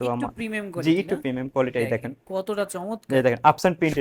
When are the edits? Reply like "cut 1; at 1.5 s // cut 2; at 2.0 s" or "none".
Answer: none